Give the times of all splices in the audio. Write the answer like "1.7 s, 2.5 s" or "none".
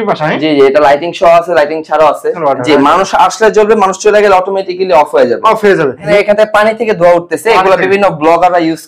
2.4 s, 6.1 s